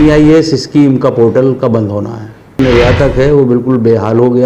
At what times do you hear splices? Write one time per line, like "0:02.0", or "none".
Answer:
0:02.6